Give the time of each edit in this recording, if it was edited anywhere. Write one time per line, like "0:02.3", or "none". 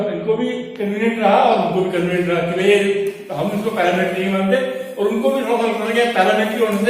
none